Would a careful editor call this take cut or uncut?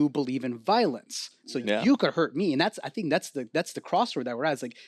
uncut